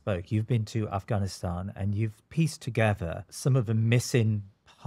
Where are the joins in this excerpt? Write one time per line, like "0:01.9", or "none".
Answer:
0:03.3